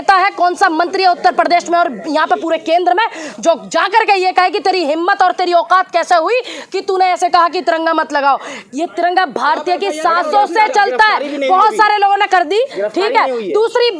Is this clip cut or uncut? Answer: uncut